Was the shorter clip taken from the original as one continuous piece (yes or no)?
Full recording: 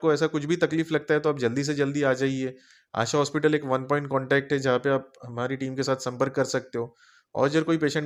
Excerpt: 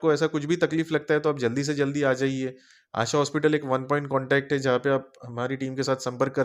yes